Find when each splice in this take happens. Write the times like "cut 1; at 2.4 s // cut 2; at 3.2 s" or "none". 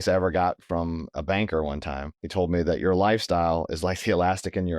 cut 1; at 1.1 s // cut 2; at 2.1 s